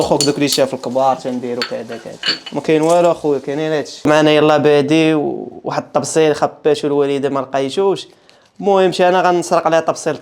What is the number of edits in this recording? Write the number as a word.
one